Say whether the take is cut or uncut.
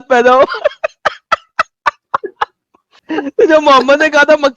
cut